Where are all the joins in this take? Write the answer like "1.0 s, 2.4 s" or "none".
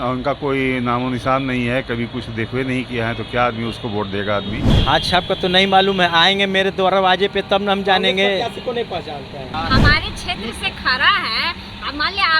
4.7 s, 9.5 s